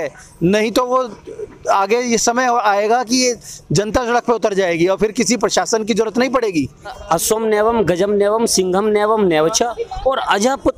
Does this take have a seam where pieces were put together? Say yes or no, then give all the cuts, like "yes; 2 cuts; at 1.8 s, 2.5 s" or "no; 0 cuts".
yes; 1 cut; at 7.0 s